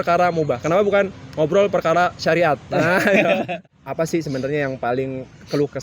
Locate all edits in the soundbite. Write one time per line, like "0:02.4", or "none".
0:03.6